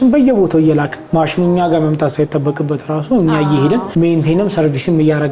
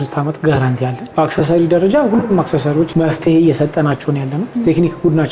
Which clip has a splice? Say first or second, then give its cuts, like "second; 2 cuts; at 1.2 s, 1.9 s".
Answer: second; 3 cuts; at 1.0 s, 2.9 s, 4.4 s